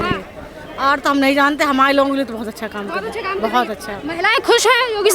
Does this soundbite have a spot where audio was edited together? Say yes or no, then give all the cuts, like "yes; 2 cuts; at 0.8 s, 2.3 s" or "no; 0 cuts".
no; 0 cuts